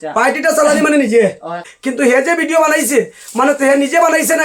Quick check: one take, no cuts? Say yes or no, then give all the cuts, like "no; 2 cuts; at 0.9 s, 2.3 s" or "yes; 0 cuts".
no; 1 cut; at 1.7 s